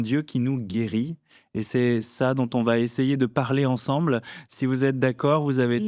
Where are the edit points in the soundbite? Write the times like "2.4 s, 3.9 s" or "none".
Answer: none